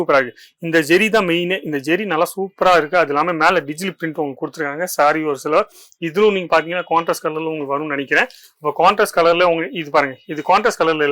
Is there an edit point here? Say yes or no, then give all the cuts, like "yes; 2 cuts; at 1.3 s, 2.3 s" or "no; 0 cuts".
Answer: no; 0 cuts